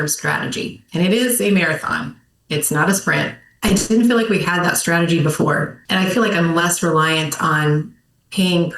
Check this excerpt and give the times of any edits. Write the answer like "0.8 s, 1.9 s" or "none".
3.5 s, 5.8 s